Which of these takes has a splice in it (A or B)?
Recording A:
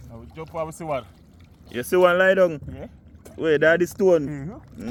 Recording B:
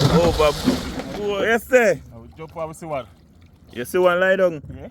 B